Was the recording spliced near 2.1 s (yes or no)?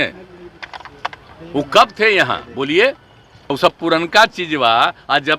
no